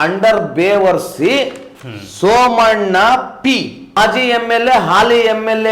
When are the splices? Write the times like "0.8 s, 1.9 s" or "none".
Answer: 4.0 s